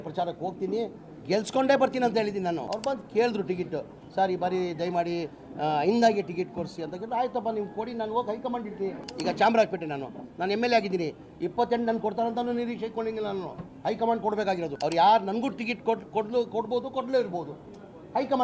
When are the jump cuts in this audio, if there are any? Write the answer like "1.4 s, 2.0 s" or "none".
2.7 s, 9.1 s, 14.7 s

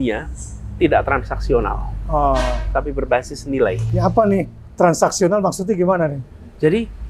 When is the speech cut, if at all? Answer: none

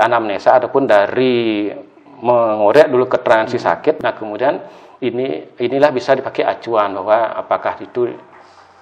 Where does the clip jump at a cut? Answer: 4.0 s

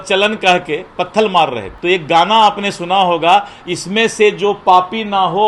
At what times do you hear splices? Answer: 1.7 s

